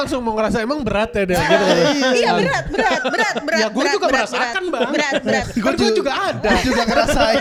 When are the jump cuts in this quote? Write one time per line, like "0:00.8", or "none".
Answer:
none